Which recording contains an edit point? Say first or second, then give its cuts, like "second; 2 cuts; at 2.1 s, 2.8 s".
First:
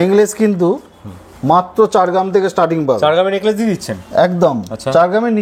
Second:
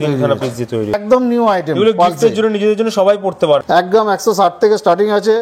second; 2 cuts; at 1.0 s, 3.6 s